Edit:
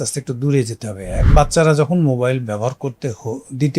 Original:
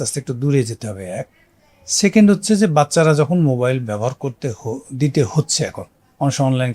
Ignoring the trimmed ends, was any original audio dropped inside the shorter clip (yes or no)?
yes